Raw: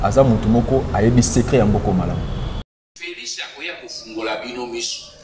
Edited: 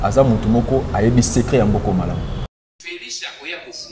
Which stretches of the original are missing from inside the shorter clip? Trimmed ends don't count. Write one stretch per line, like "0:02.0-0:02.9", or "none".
0:02.5-0:02.6